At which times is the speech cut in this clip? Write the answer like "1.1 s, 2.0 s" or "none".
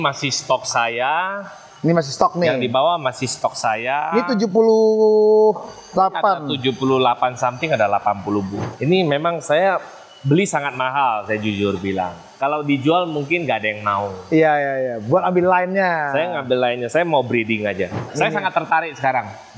8.6 s, 18.1 s